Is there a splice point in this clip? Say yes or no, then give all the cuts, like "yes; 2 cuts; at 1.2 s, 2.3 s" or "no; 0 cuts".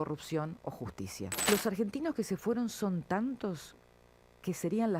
yes; 1 cut; at 1.5 s